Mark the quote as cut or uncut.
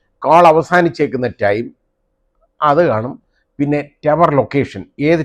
uncut